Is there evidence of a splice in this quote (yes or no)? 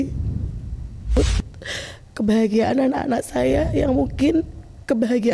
yes